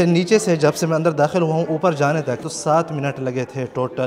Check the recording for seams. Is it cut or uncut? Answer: cut